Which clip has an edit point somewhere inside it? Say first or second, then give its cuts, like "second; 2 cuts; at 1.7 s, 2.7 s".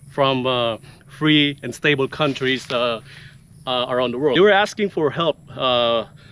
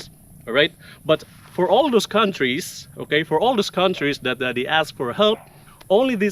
first; 1 cut; at 4.3 s